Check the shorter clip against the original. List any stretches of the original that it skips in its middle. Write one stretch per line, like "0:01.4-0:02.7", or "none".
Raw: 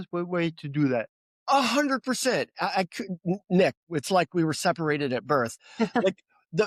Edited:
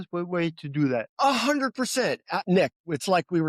0:01.1-0:01.4
0:02.7-0:03.4